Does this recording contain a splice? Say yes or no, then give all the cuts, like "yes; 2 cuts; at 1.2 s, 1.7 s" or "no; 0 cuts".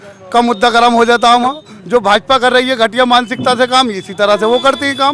yes; 1 cut; at 1.7 s